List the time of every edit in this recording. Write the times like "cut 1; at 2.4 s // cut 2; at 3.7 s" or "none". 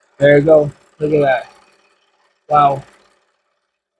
none